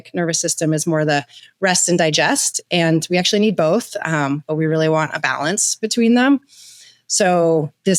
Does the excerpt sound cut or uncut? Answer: uncut